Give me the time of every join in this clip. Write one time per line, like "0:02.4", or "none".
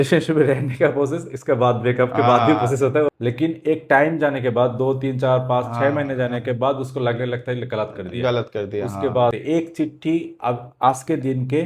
0:03.1
0:09.4

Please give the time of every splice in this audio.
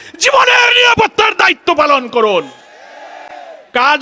none

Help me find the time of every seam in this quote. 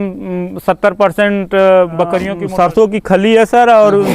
0:02.4

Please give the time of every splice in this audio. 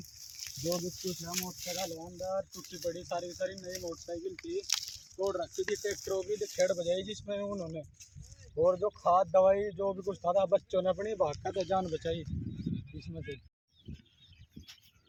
none

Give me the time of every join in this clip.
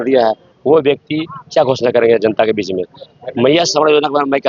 none

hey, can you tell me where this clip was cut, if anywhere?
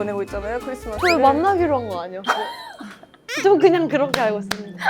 none

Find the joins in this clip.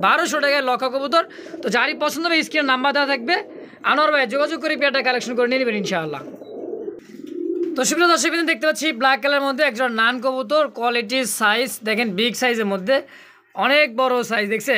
none

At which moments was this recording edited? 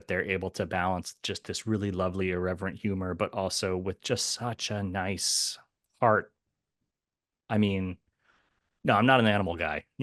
0:06.4

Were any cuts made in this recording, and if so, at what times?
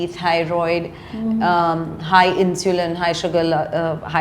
none

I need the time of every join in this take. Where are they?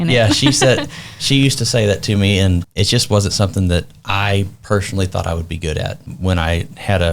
0:02.7
0:06.1

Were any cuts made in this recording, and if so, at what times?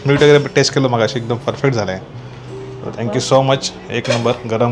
none

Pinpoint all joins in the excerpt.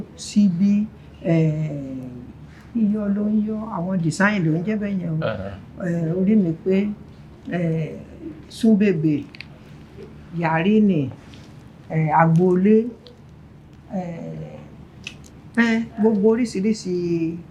none

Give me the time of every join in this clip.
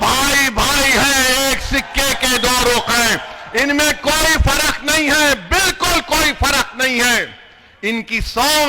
none

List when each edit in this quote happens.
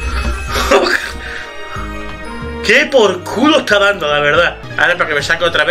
0:04.6

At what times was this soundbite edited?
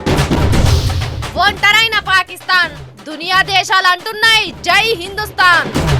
0:01.1

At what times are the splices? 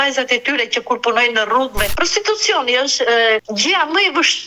0:01.9
0:03.5

